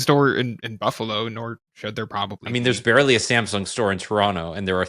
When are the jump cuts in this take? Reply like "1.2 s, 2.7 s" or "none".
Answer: 2.4 s